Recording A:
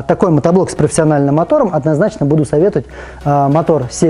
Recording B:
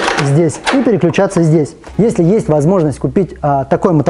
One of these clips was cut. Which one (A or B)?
B